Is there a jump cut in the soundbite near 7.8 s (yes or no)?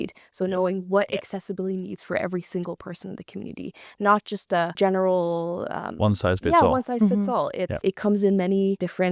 yes